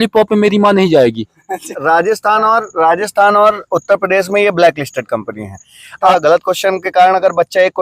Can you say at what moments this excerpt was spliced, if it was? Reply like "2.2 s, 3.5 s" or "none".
1.7 s, 6.1 s